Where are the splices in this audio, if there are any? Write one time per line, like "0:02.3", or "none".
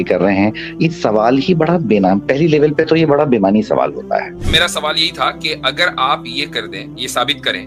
0:04.5